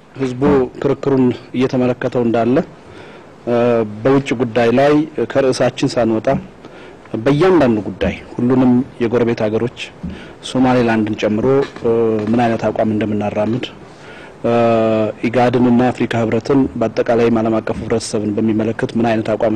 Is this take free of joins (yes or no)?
no